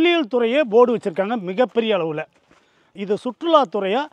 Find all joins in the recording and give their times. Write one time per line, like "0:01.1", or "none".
0:02.9